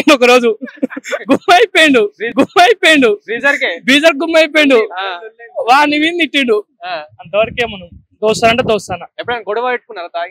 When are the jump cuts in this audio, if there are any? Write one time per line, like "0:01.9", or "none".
none